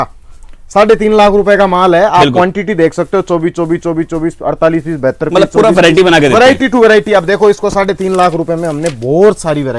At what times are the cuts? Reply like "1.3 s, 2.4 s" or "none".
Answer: none